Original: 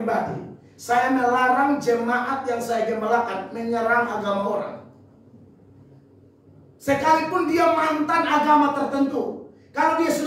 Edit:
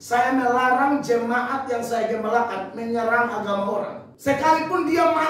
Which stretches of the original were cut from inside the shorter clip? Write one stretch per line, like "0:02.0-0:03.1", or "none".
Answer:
0:04.8-0:06.7

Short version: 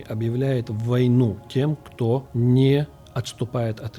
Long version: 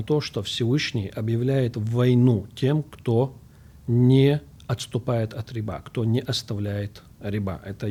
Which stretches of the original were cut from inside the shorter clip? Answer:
0:03.4-0:03.8

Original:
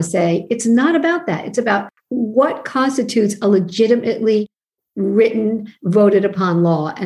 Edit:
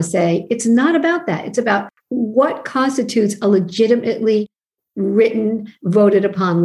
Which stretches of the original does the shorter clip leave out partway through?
none

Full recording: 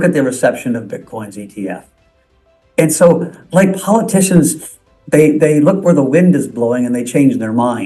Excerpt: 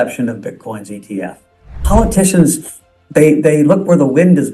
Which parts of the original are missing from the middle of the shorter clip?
0:02.3-0:03.8

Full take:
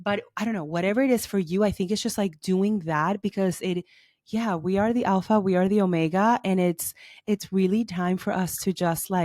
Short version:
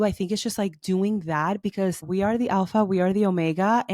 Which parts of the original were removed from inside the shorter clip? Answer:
0:03.6-0:04.6

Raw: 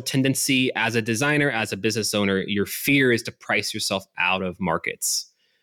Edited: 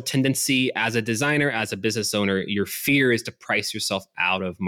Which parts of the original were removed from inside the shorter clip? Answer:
none

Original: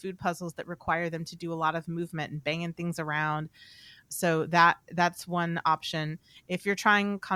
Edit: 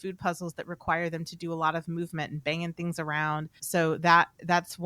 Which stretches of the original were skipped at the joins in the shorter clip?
0:03.6-0:04.0

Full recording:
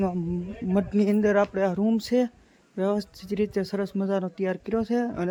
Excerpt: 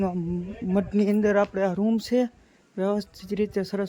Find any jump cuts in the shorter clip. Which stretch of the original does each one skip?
none

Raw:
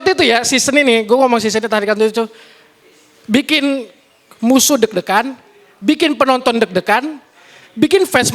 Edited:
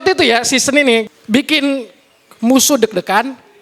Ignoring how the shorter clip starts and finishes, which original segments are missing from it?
0:01.0-0:03.0

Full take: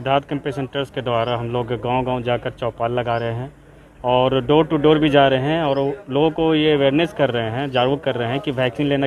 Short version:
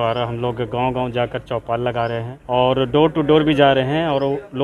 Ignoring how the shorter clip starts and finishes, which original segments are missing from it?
0:03.4-0:03.9

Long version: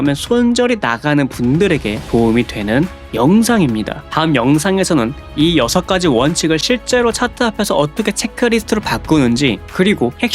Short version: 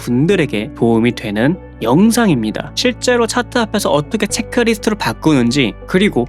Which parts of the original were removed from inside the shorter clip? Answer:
0:04.1-0:06.6

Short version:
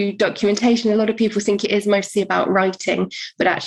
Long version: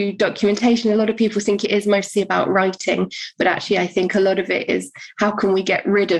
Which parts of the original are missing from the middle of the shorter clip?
none

